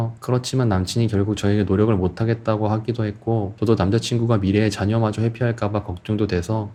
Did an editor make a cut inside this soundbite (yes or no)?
no